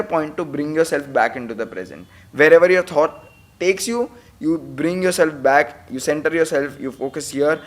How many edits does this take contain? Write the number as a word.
zero